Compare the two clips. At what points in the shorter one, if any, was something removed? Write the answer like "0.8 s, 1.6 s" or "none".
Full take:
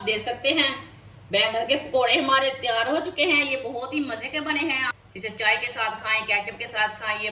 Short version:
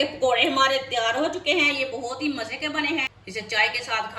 3.1 s